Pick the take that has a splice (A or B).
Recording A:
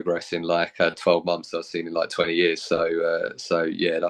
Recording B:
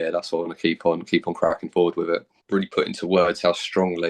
B